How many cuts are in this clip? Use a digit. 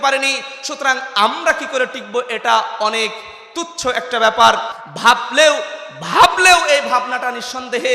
0